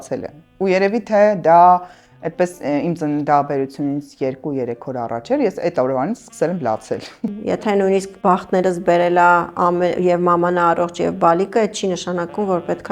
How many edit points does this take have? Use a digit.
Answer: 2